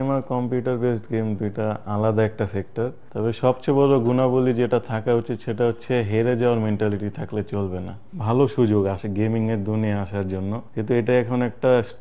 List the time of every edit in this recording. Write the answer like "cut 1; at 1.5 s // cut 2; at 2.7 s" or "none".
cut 1; at 3.0 s // cut 2; at 8.1 s // cut 3; at 10.6 s